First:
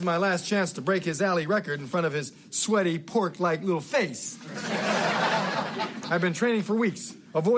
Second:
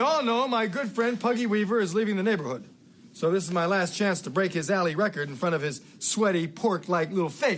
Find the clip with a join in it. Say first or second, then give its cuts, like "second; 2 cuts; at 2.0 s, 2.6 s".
first; 1 cut; at 5.2 s